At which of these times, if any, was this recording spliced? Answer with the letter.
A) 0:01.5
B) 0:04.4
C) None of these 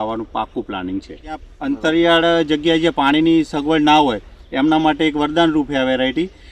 A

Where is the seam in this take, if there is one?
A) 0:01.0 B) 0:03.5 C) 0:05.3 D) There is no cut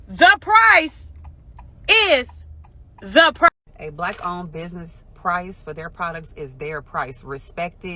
B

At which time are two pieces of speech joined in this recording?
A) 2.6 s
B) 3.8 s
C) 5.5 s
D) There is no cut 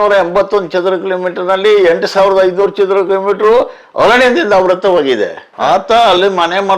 C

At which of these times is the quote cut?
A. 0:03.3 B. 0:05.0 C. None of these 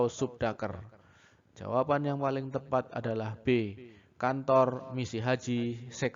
A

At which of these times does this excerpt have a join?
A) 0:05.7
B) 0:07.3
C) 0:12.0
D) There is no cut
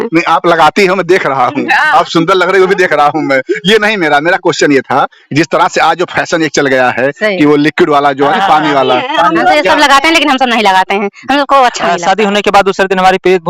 C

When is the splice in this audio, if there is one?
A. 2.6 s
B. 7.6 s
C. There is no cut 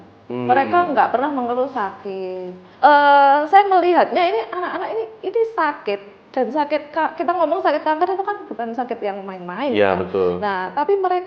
A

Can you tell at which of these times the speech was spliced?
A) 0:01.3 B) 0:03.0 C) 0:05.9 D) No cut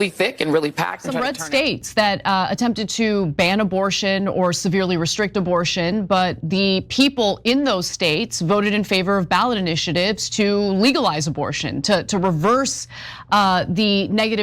A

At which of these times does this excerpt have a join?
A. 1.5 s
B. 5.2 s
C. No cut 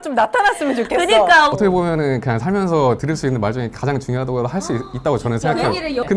A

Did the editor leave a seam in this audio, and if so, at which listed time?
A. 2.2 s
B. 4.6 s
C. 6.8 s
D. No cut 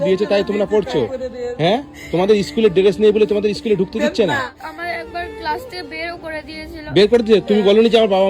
B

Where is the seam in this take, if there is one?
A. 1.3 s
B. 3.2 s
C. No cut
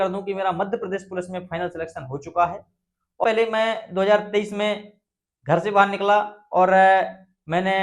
B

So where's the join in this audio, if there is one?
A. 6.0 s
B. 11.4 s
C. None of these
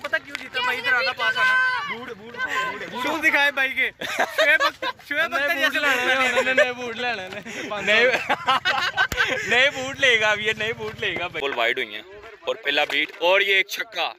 B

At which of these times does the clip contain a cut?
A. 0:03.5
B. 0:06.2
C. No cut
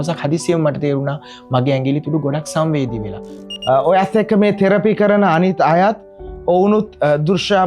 A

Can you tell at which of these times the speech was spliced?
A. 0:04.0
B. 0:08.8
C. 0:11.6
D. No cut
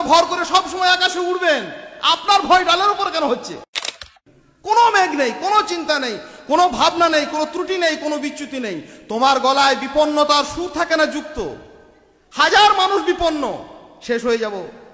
A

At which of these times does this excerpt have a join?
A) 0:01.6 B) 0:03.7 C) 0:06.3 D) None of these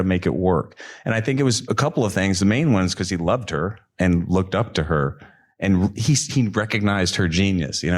A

